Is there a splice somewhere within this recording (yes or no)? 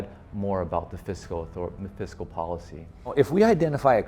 yes